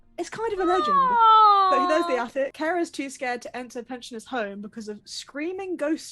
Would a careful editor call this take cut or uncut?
cut